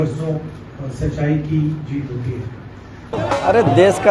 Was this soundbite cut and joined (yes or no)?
yes